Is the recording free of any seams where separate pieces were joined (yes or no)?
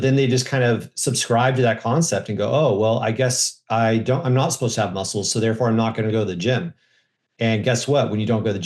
yes